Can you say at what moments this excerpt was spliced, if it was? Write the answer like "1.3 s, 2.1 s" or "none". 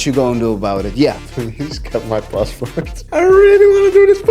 1.2 s